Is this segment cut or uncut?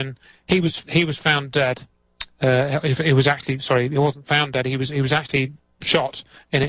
cut